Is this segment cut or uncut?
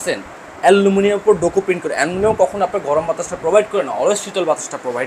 uncut